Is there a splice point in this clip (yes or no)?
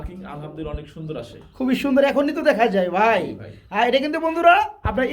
no